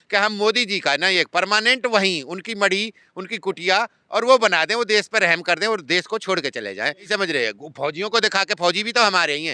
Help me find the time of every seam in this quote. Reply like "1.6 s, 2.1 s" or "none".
7.1 s